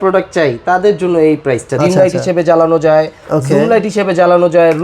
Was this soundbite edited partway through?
yes; 1 cut; at 1.7 s

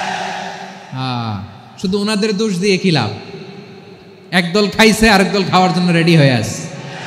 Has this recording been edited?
no; 0 cuts

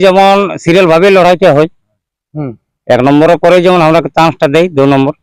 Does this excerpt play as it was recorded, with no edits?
yes; 0 cuts

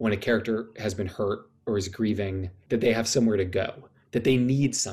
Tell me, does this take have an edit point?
yes; 2 cuts; at 1.5 s, 2.5 s

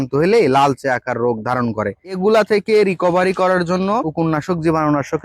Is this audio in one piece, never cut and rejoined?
yes; 0 cuts

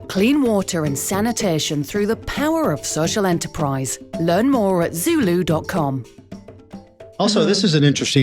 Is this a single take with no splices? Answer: no; 1 cut; at 7.0 s

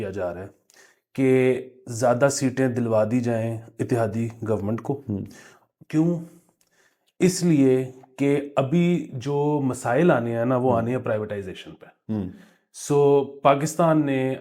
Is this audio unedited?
yes; 0 cuts

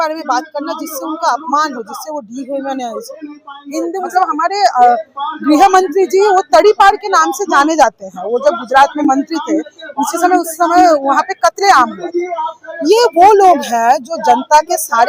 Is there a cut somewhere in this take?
yes; 1 cut; at 4.1 s

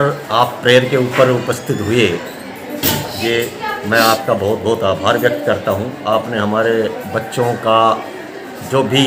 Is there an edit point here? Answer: no; 0 cuts

